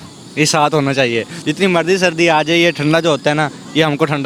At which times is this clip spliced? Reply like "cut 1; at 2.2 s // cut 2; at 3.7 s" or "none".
none